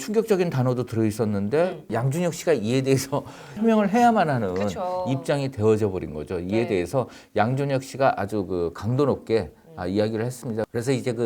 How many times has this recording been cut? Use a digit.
1